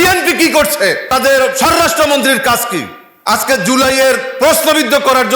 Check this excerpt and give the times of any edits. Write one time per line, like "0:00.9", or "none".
0:01.0

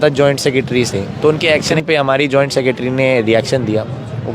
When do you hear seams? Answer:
0:01.0

